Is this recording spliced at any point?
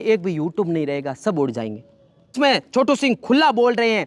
yes; 1 cut; at 2.4 s

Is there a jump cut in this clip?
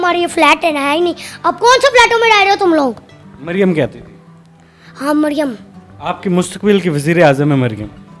no; 0 cuts

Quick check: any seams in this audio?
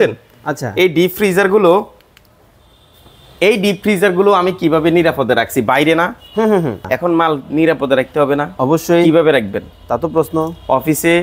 yes; 1 cut; at 6.8 s

